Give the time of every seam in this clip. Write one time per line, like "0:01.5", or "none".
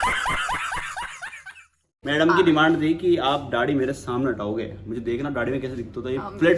0:01.9